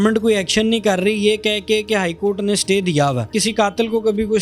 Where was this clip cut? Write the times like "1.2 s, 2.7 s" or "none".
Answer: 3.3 s